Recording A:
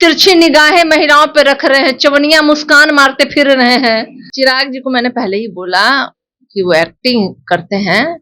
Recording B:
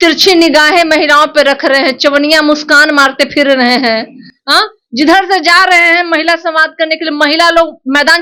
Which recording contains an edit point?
A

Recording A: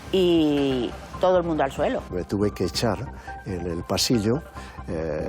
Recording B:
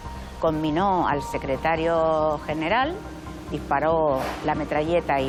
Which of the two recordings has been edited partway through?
A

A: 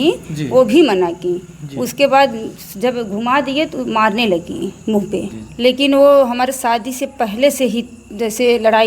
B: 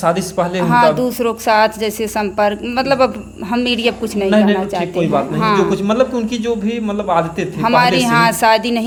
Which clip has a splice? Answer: A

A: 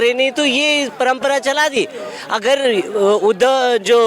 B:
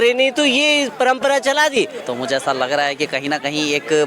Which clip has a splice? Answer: B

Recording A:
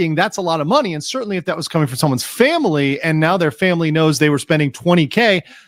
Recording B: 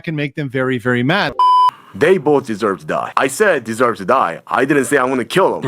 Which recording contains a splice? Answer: B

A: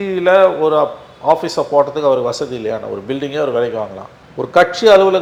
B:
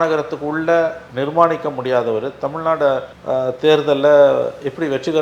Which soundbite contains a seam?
B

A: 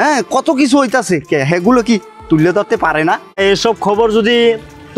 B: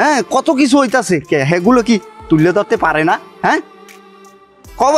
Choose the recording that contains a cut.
A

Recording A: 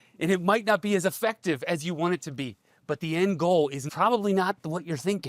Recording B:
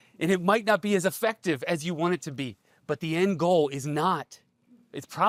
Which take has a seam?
A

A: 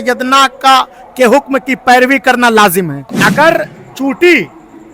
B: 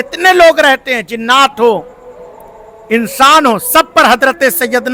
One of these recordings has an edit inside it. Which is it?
A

